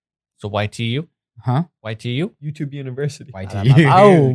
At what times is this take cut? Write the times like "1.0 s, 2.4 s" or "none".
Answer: 2.4 s